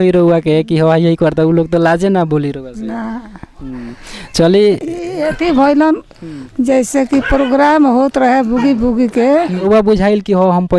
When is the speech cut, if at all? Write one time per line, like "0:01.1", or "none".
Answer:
0:09.6